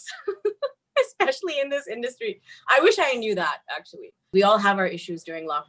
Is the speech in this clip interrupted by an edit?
yes; 1 cut; at 4.2 s

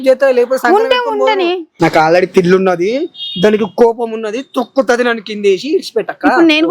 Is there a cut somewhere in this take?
yes; 1 cut; at 1.7 s

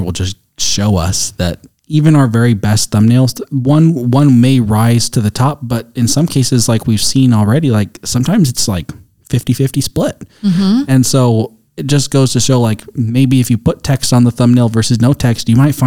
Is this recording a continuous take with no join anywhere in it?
yes; 0 cuts

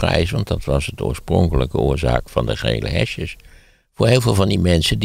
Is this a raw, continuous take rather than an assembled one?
yes; 0 cuts

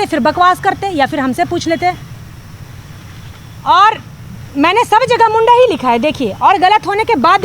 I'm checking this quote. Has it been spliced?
no; 0 cuts

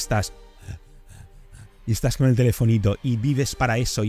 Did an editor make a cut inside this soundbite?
no; 0 cuts

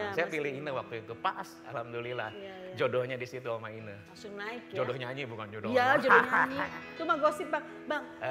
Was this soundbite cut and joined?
no; 0 cuts

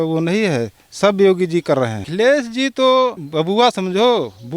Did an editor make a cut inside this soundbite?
yes; 2 cuts; at 2.1 s, 3.2 s

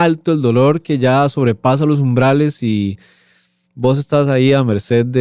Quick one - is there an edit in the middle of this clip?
no; 0 cuts

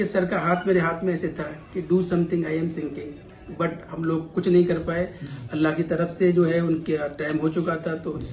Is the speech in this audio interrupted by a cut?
no; 0 cuts

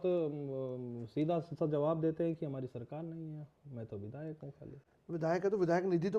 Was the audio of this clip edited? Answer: no; 0 cuts

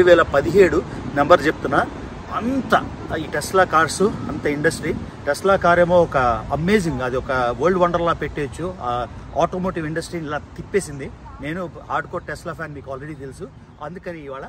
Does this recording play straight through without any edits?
yes; 0 cuts

